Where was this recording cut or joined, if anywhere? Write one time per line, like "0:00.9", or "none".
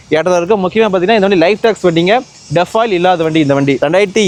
none